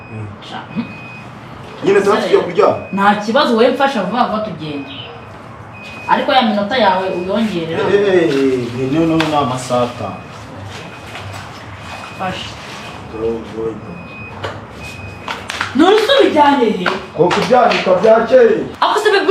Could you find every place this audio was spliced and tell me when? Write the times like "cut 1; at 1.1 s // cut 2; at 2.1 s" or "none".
none